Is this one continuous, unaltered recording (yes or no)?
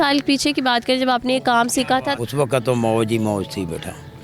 no